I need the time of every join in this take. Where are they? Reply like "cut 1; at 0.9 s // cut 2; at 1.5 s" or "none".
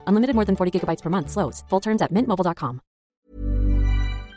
cut 1; at 3.2 s